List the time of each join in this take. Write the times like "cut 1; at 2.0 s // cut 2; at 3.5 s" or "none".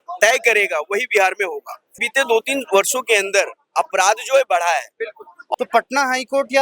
cut 1; at 2.0 s // cut 2; at 5.3 s

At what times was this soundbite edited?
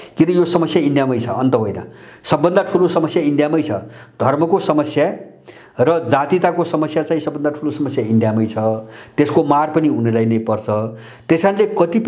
none

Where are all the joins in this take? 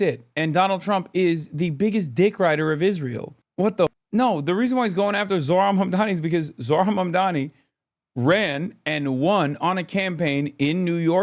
cut 1; at 4.0 s

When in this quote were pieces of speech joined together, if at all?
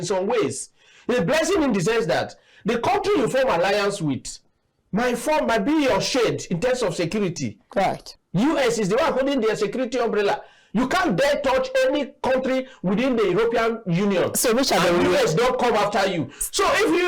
cut 1; at 8.1 s

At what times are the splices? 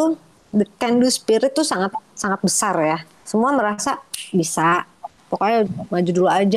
cut 1; at 3.1 s

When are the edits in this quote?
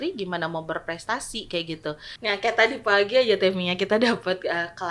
cut 1; at 2.2 s

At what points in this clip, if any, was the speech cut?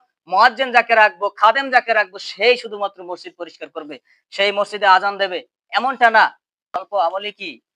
cut 1; at 6.8 s

